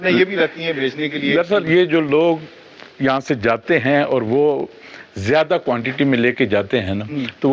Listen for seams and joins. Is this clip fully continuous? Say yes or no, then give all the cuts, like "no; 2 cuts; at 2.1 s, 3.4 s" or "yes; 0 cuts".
yes; 0 cuts